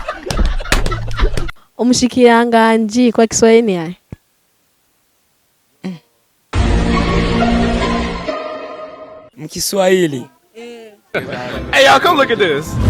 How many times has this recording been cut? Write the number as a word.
zero